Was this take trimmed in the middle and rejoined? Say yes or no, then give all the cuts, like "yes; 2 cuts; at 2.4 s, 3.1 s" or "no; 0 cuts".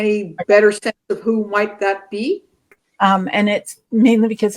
yes; 1 cut; at 2.7 s